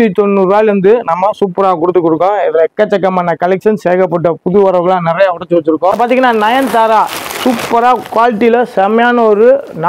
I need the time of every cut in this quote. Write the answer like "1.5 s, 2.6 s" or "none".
6.0 s